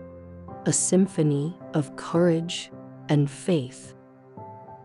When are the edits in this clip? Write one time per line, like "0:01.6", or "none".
0:03.7